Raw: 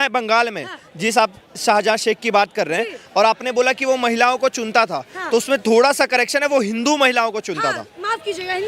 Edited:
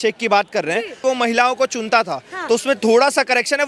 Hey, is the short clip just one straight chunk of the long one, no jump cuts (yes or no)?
no